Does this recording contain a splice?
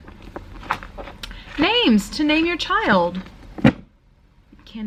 no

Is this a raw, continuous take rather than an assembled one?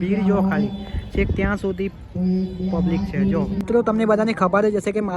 no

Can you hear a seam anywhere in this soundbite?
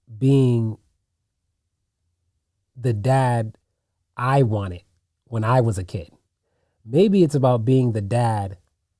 no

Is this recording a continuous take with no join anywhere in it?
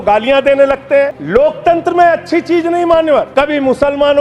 no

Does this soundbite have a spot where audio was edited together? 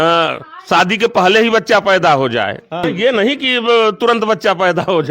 yes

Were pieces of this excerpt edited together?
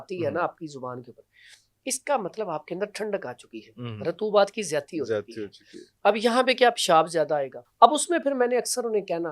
yes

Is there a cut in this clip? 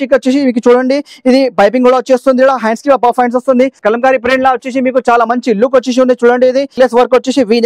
yes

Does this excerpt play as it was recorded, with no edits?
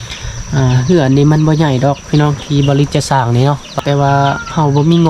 no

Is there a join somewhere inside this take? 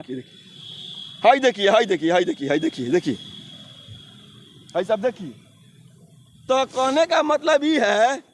no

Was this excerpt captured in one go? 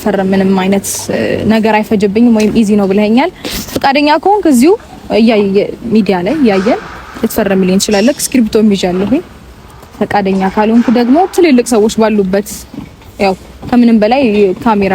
yes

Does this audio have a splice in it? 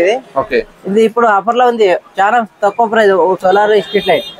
yes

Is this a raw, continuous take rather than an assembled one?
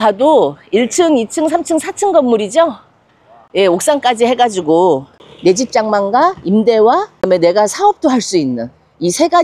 no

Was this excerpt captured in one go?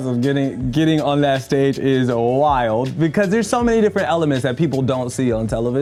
yes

